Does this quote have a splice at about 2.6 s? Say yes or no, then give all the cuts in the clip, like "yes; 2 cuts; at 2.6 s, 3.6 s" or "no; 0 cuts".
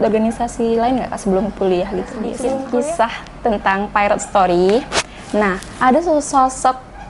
yes; 1 cut; at 2.6 s